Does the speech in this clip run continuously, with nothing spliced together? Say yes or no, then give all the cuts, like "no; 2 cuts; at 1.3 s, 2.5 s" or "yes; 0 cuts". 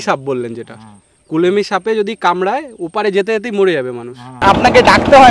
no; 1 cut; at 4.4 s